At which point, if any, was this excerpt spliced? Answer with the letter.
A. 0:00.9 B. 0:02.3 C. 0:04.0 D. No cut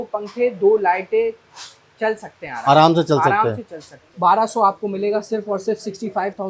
C